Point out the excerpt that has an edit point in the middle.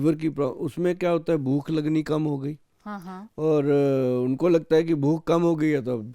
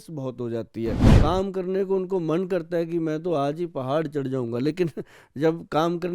second; 1 cut; at 1.1 s

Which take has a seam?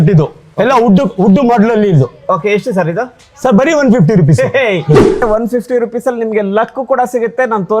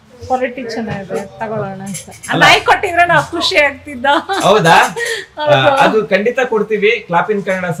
first; 1 cut; at 5.2 s

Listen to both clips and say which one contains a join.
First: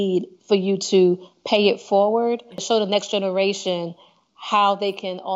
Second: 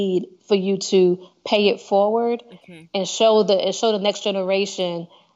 first; 1 cut; at 2.6 s

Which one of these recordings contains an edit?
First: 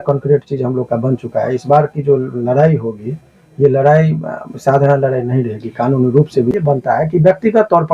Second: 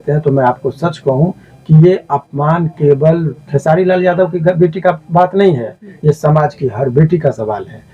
first; 1 cut; at 6.5 s

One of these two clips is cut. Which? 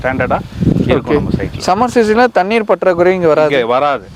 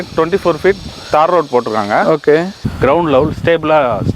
second; 1 cut; at 2.6 s

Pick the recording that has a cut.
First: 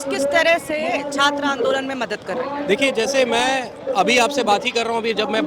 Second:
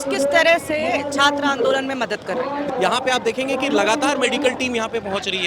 second; 1 cut; at 2.7 s

